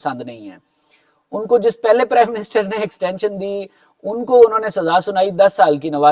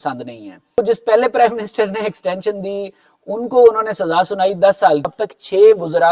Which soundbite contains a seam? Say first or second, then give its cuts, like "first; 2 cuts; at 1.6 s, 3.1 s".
second; 2 cuts; at 0.8 s, 5.1 s